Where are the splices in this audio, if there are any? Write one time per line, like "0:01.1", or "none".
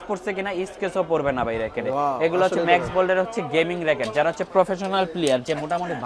none

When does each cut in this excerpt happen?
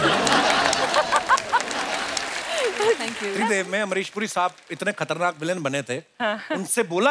0:03.1

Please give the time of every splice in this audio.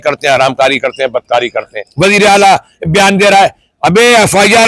0:01.8

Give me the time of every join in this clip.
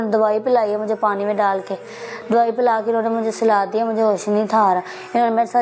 none

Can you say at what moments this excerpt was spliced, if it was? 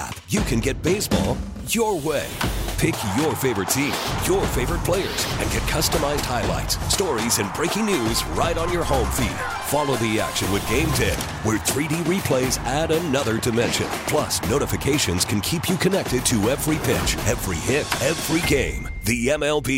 none

